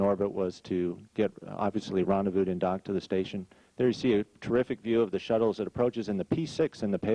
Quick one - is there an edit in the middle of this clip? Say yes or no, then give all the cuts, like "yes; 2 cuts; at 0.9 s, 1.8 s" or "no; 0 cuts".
yes; 1 cut; at 1.7 s